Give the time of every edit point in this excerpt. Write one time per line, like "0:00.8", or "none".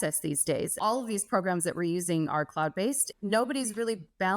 0:00.8
0:03.1

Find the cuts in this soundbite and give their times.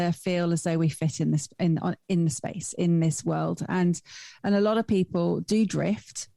none

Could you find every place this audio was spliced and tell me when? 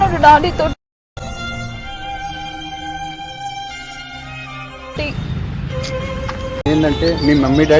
0:06.7

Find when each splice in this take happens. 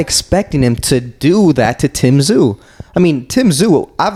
none

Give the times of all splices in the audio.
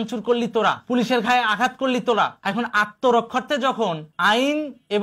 0:00.8
0:02.4

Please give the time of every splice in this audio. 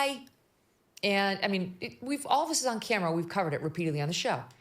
0:03.7

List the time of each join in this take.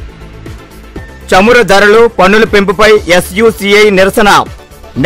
0:01.0

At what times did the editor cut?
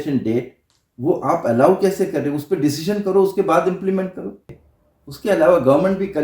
0:04.5

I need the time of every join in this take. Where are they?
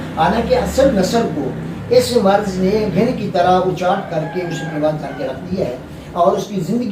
none

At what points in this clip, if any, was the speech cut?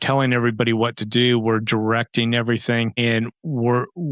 none

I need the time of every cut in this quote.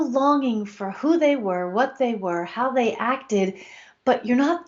none

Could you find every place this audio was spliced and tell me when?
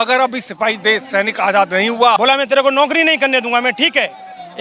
0:02.2

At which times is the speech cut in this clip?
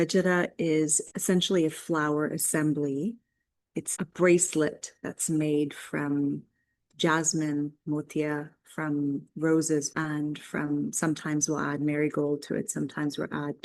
0:01.0
0:03.9
0:09.9

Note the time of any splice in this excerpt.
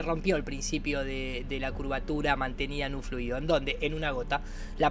none

